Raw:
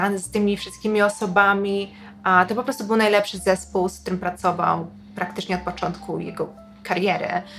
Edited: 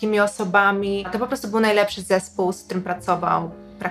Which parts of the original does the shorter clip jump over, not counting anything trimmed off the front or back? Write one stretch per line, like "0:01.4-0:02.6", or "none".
0:02.0-0:02.5